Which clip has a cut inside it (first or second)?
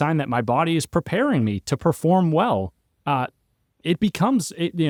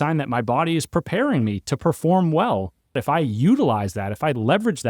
second